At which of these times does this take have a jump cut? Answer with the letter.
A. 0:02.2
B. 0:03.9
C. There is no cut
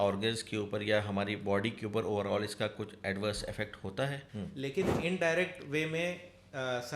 B